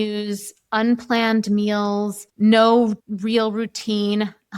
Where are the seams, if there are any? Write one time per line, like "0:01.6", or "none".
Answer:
0:02.2
0:03.1